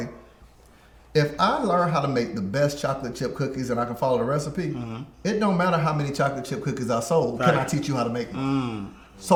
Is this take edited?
no; 0 cuts

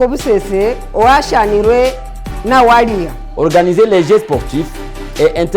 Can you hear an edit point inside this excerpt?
yes; 1 cut; at 3.2 s

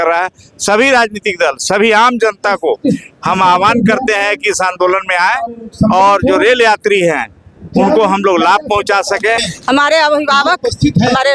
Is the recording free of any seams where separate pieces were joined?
no; 1 cut; at 9.5 s

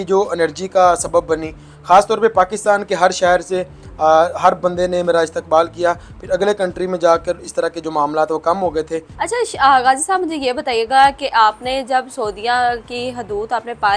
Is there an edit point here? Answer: no; 0 cuts

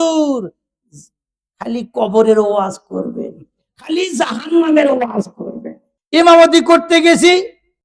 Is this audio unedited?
no; 1 cut; at 5.9 s

